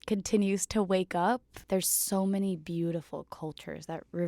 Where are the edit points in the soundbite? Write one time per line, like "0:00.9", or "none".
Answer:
0:01.5